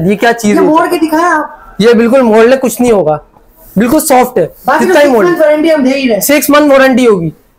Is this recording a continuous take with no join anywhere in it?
yes; 0 cuts

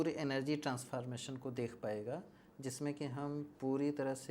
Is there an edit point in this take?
no; 0 cuts

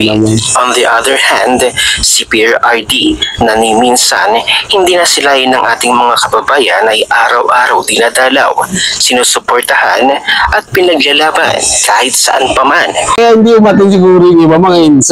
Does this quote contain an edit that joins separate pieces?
yes; 1 cut; at 13.2 s

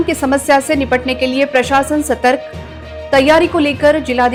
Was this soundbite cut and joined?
no; 0 cuts

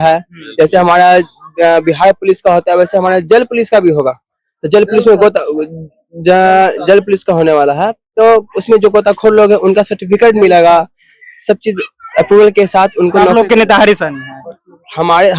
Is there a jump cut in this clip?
no; 0 cuts

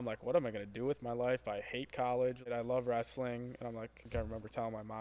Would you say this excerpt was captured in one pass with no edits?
no; 2 cuts; at 2.5 s, 4.1 s

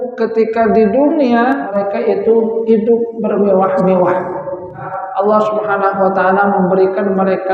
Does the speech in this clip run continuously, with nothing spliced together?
no; 2 cuts; at 1.7 s, 5.0 s

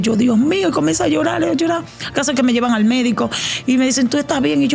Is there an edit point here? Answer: no; 0 cuts

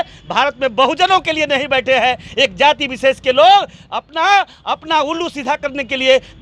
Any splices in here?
no; 0 cuts

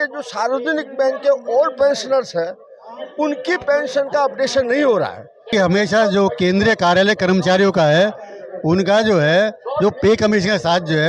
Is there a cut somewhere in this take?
yes; 1 cut; at 5.5 s

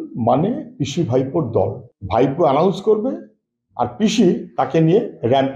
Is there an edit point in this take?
yes; 1 cut; at 1.9 s

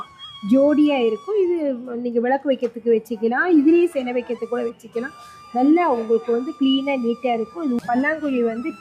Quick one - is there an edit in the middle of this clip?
yes; 1 cut; at 7.8 s

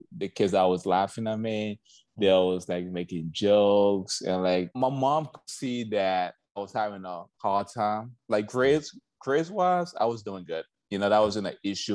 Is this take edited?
yes; 1 cut; at 4.7 s

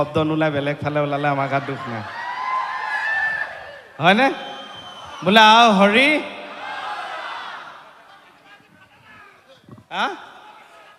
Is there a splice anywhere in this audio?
no; 0 cuts

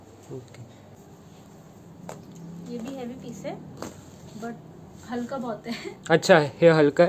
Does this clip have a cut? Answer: yes; 1 cut; at 0.9 s

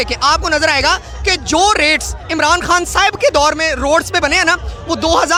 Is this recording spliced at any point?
no; 0 cuts

